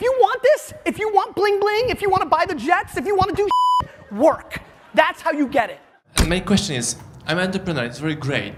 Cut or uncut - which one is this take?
uncut